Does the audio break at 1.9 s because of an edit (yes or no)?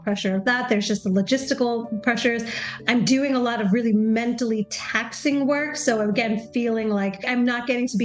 yes